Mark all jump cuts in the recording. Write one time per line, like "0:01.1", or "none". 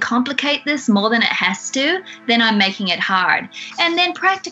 0:03.6